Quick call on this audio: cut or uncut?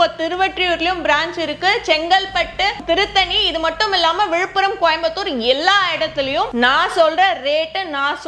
cut